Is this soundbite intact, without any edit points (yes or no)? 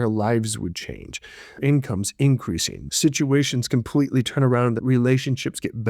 no